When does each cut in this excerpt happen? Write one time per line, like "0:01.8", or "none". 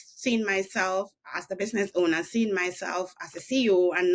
none